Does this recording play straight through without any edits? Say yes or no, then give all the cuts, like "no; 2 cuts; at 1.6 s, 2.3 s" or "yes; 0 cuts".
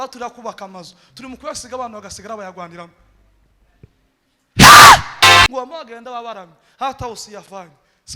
no; 1 cut; at 5.5 s